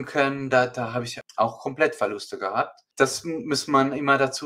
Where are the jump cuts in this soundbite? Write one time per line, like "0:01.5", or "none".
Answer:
0:01.1
0:02.8